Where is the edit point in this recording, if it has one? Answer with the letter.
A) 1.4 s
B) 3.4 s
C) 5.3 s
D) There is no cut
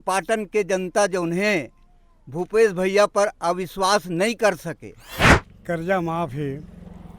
C